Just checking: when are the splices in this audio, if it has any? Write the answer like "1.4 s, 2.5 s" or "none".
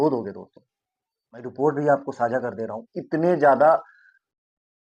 none